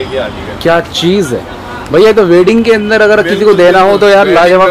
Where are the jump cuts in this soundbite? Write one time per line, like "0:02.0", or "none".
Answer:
none